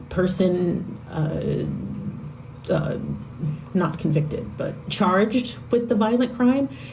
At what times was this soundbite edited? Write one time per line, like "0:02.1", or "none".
0:03.0